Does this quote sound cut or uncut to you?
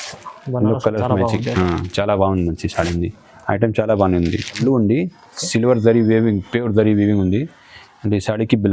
cut